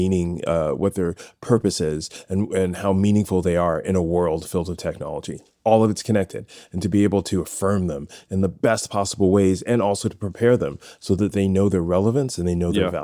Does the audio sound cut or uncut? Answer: uncut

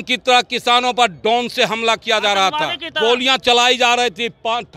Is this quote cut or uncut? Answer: cut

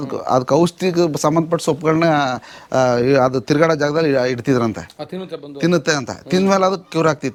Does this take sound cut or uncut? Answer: uncut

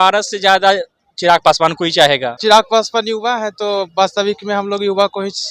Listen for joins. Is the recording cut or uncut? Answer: cut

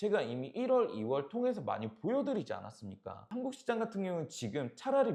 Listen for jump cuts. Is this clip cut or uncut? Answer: uncut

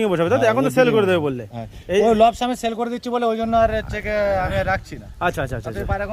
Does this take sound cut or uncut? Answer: uncut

